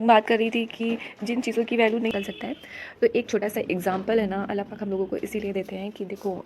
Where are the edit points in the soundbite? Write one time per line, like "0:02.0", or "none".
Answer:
0:02.1